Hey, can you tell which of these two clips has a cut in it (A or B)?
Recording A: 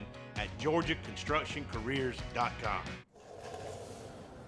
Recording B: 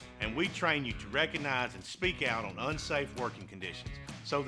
A